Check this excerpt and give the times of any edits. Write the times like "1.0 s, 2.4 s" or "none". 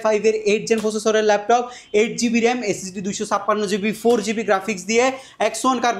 none

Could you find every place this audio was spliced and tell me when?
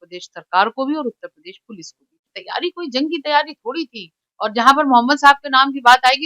2.4 s

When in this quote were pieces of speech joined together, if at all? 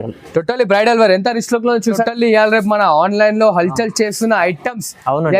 2.0 s

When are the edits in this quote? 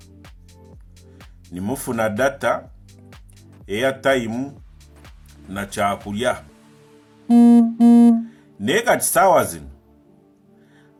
none

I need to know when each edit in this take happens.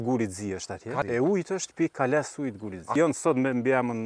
1.0 s, 2.9 s

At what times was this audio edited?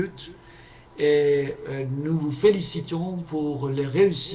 2.2 s

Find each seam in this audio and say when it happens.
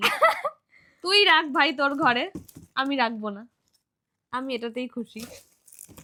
none

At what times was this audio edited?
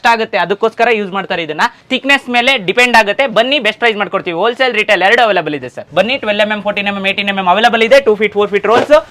1.8 s, 5.8 s

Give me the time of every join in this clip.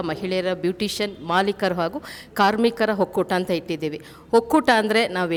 none

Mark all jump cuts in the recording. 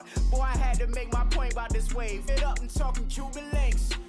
2.3 s

